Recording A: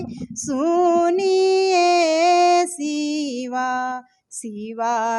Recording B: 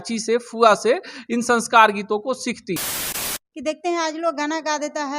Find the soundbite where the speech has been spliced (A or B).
B